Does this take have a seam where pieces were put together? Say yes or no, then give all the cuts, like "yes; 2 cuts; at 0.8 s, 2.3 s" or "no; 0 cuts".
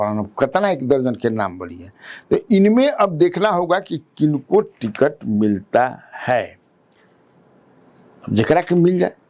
no; 0 cuts